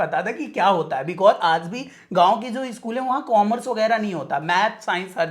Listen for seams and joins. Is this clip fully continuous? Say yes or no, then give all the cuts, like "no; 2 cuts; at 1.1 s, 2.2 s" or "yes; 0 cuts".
yes; 0 cuts